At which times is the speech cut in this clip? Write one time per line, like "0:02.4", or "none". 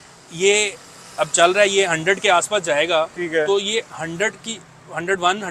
none